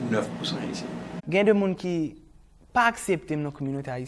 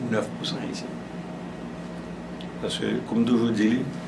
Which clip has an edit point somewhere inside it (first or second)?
first